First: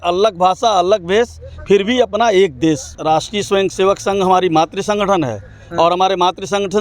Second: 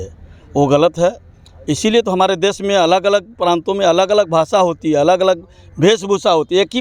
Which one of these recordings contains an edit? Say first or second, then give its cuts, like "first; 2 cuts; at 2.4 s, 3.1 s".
first; 1 cut; at 2.9 s